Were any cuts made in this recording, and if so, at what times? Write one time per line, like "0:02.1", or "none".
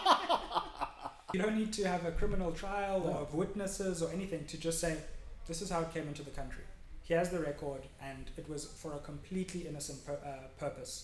0:01.3